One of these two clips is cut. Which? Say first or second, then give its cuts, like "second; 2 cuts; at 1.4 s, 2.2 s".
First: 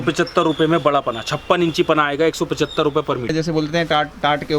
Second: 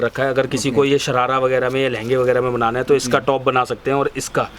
first; 1 cut; at 3.3 s